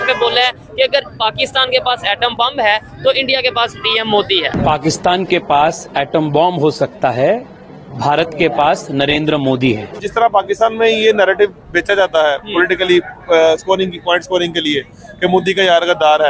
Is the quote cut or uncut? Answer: cut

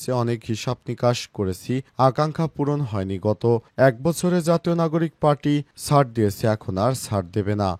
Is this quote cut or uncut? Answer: uncut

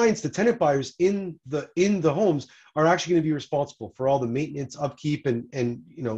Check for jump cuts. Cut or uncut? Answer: uncut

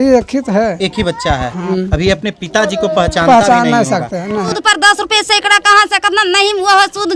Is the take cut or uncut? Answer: cut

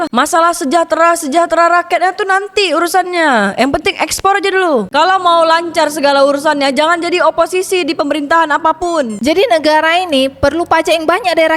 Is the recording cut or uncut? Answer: cut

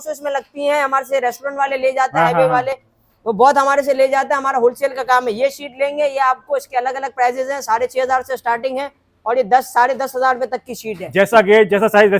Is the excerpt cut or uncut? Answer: uncut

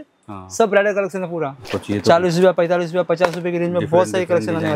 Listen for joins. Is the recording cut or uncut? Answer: cut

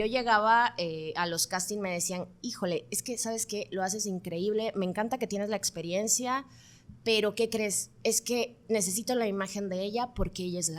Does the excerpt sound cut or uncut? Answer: uncut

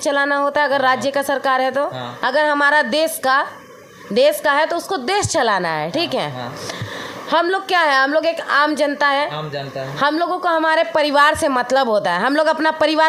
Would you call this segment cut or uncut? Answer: uncut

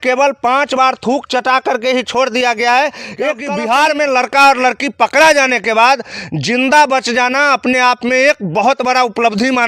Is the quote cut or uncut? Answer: cut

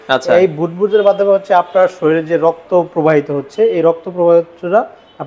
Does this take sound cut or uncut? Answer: uncut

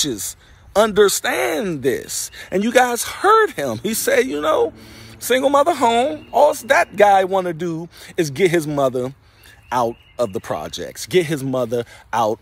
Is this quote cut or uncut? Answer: uncut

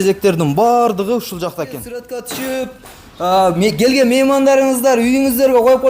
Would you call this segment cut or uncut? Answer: cut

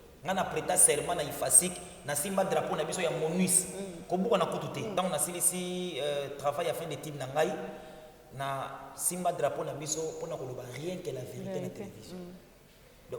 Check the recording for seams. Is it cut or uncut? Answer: cut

